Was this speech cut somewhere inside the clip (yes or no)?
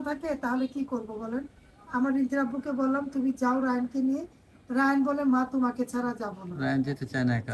no